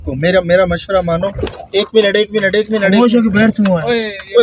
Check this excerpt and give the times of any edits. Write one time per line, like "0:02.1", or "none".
none